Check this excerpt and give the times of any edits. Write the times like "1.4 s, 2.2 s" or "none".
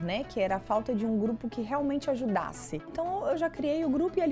2.9 s